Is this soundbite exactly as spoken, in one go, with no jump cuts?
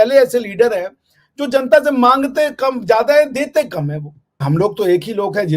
no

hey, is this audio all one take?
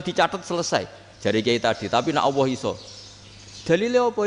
yes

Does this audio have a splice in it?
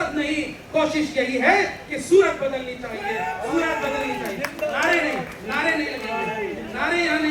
no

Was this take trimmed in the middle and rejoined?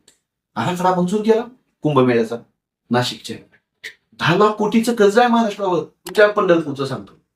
yes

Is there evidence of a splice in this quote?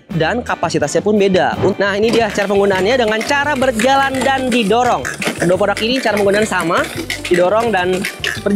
yes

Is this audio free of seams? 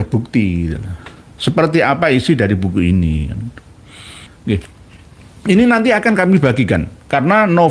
no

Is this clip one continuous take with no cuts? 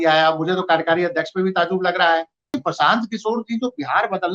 no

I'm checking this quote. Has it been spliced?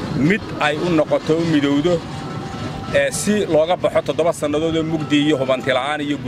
no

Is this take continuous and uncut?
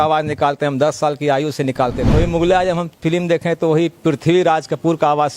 no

